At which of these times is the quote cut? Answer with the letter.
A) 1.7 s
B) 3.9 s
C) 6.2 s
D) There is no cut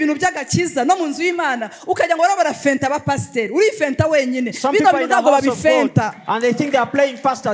D